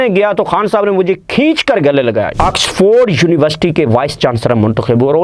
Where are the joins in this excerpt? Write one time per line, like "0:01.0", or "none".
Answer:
0:02.3